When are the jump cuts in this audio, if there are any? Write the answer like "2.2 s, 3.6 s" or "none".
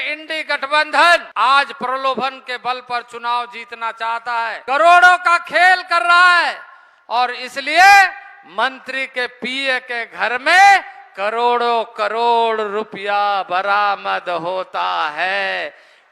1.3 s, 4.6 s